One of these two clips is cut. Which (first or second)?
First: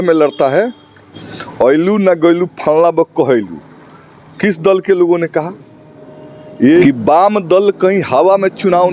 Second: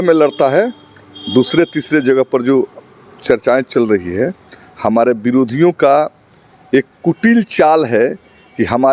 first